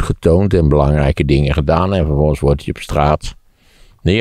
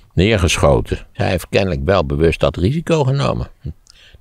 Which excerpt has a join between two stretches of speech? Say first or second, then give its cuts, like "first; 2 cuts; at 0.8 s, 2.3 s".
second; 1 cut; at 1.2 s